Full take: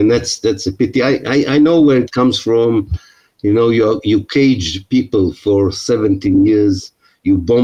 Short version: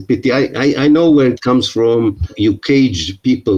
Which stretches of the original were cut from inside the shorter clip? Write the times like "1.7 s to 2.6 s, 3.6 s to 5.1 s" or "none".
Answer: 3.0 s to 4.0 s